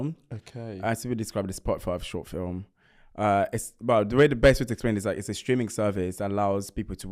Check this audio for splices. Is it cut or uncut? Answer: uncut